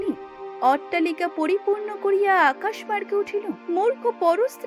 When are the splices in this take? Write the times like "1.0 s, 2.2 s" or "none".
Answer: 3.6 s